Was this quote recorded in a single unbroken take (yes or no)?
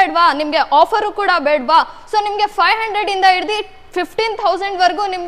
yes